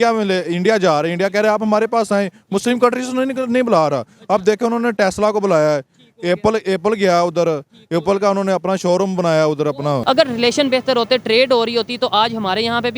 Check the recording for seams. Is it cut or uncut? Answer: cut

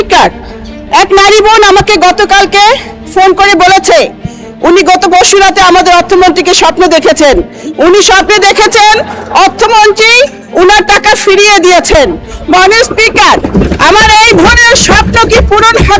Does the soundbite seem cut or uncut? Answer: uncut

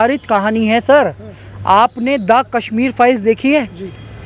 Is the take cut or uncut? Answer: uncut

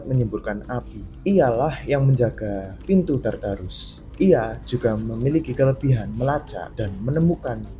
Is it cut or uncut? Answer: uncut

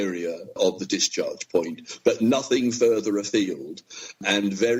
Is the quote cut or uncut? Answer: uncut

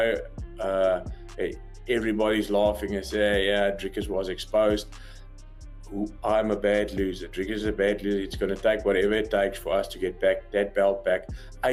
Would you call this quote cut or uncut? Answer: uncut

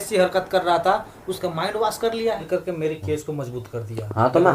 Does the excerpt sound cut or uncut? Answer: cut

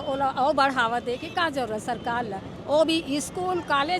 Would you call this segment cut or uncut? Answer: uncut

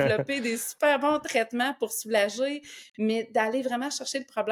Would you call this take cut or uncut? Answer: uncut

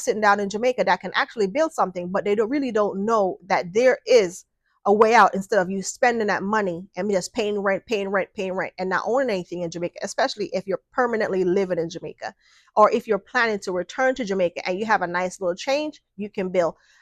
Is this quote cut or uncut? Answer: uncut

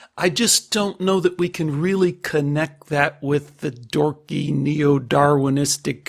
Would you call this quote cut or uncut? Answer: uncut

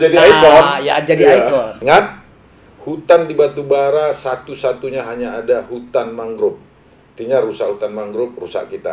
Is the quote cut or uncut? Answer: cut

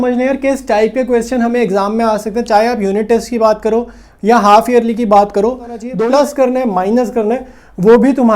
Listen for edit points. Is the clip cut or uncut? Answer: cut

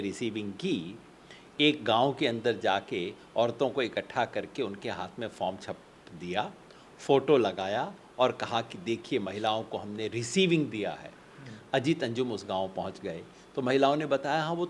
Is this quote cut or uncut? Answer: uncut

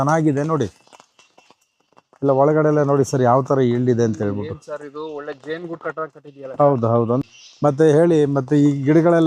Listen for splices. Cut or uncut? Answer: cut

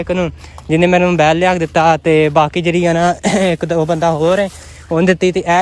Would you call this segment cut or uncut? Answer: uncut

